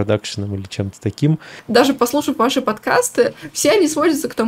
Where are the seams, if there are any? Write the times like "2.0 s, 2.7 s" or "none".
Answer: 1.4 s

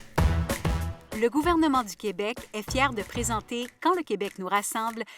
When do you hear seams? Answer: 0.9 s

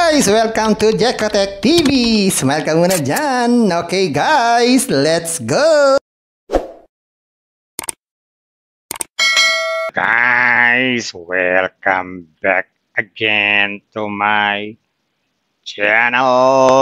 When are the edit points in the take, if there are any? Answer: 9.8 s

